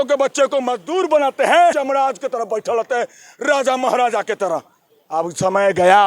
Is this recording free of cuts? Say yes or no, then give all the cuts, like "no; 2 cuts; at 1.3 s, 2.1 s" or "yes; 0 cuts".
no; 1 cut; at 1.8 s